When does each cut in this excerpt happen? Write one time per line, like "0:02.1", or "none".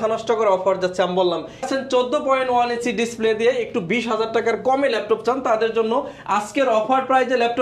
0:01.7

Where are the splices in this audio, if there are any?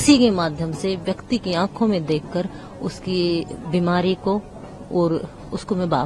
none

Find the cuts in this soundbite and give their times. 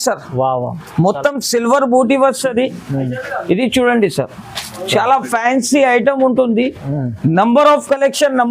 none

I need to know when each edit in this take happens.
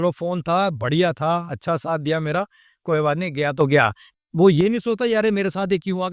0:04.1

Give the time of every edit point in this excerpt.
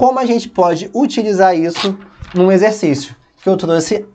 none

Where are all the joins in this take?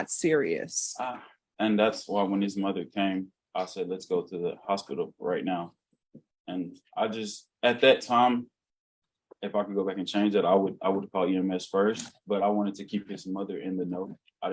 none

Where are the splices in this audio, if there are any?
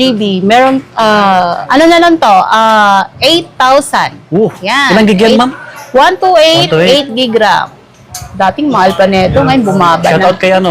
0:01.6

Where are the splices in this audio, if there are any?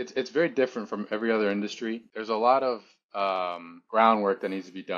0:02.1

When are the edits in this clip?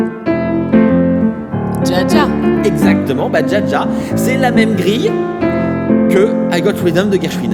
none

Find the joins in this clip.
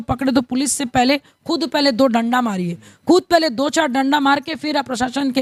none

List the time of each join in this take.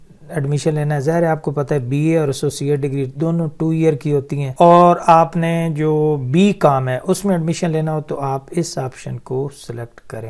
0:04.4

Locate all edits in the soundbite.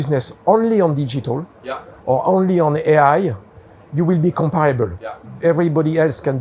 0:05.3

